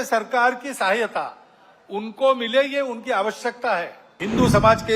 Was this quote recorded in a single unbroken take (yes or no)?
no